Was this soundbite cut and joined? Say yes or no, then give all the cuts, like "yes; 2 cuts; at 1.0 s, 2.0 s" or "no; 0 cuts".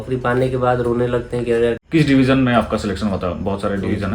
yes; 1 cut; at 1.8 s